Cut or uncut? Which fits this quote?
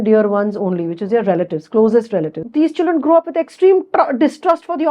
cut